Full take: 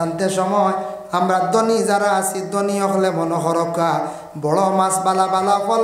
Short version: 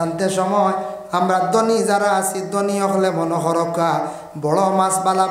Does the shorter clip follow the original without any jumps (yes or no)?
yes